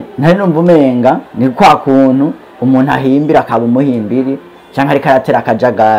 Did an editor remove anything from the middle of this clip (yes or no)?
no